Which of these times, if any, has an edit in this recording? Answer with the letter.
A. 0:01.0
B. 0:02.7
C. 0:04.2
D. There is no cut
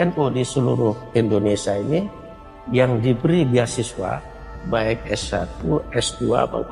A